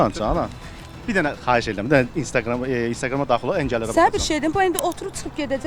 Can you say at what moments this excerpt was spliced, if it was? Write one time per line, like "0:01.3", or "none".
none

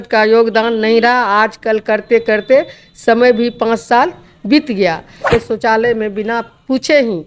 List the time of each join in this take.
0:05.3

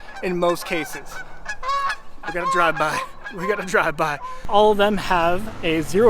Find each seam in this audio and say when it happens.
0:04.4

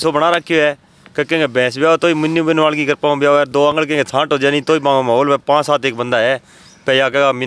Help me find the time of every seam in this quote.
none

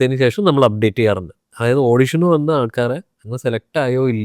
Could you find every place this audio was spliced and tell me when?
none

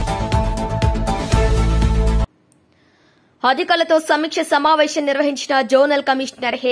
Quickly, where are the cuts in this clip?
0:02.4

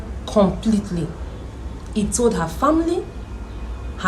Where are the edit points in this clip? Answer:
none

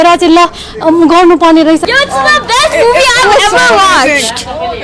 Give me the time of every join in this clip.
0:01.8

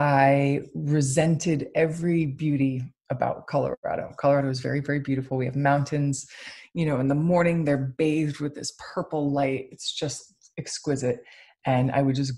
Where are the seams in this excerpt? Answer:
none

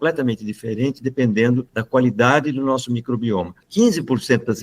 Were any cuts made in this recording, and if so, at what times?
0:01.7
0:03.6

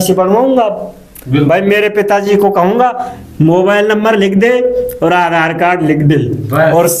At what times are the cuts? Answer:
none

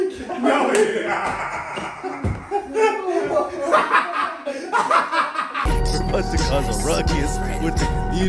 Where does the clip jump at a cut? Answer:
0:05.6

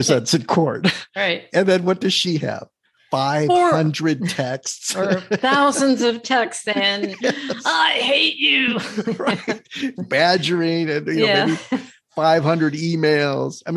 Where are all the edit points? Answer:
none

